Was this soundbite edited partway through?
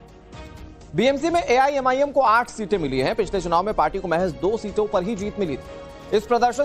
yes; 1 cut; at 1.9 s

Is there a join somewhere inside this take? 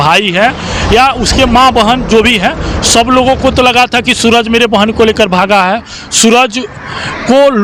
no; 0 cuts

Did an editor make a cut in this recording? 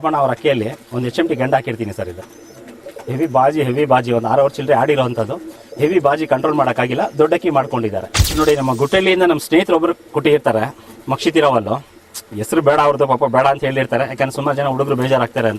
yes; 1 cut; at 8.4 s

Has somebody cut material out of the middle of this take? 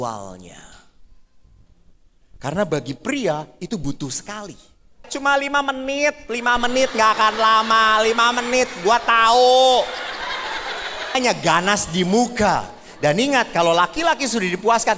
yes; 2 cuts; at 5.1 s, 11.2 s

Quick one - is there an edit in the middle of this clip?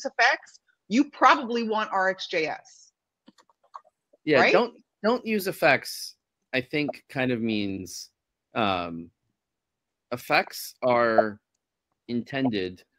no; 0 cuts

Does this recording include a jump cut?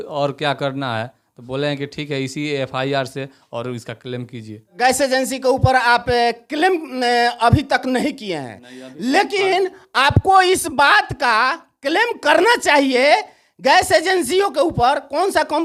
no; 0 cuts

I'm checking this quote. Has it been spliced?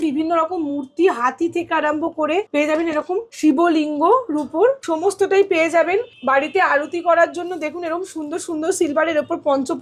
yes; 4 cuts; at 2.5 s, 3.3 s, 4.9 s, 6.1 s

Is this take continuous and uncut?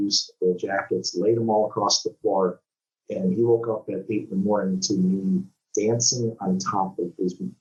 yes; 0 cuts

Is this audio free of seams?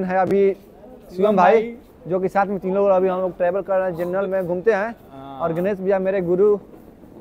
yes; 0 cuts

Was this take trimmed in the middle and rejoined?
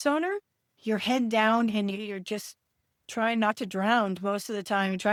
no; 0 cuts

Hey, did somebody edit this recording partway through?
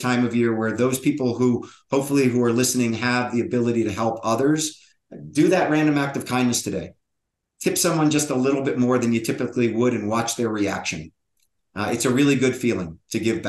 no; 0 cuts

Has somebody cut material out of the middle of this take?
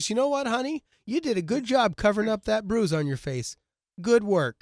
no; 0 cuts

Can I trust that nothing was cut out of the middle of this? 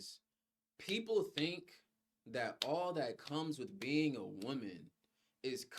yes; 0 cuts

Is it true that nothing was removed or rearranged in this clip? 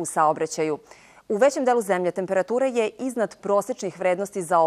no; 1 cut; at 3.0 s

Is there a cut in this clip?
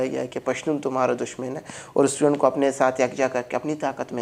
no; 0 cuts

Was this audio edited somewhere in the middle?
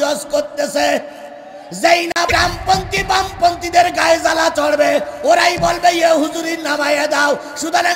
yes; 1 cut; at 2.3 s

